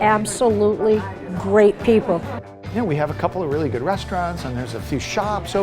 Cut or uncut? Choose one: cut